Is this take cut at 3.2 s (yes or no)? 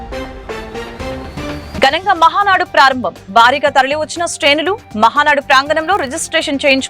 no